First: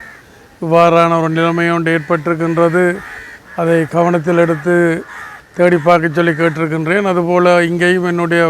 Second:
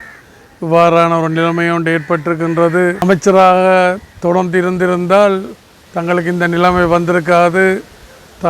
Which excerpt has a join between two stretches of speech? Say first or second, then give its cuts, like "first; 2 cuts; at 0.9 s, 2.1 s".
second; 1 cut; at 3.0 s